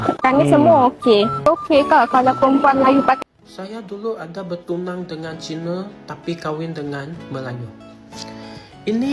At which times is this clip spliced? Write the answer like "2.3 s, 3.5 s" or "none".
3.2 s